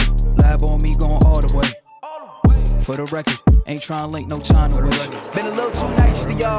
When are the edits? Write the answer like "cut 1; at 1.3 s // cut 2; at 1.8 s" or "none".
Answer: cut 1; at 5.0 s